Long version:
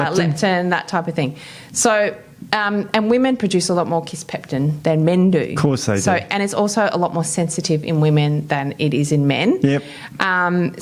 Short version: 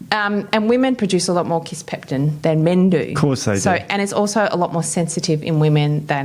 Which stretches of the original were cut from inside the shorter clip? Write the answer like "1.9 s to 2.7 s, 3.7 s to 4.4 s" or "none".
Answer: none